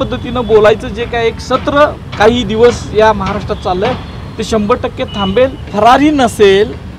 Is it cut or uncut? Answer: cut